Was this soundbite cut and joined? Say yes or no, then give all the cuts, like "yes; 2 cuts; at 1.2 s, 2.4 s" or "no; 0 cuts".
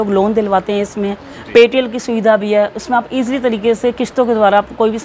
no; 0 cuts